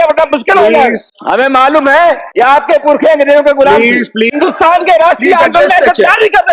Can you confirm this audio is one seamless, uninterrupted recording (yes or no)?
no